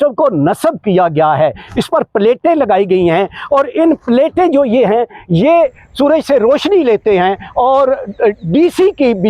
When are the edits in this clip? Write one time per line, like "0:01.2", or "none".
none